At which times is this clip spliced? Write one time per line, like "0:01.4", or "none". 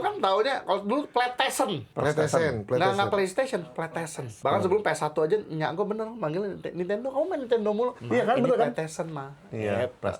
0:01.9
0:04.3
0:08.0